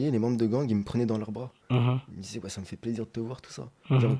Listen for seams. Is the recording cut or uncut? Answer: uncut